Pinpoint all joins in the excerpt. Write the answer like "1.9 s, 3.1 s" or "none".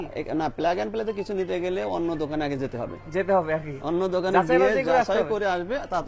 none